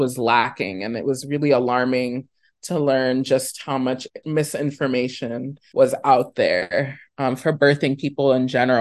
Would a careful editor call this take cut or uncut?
cut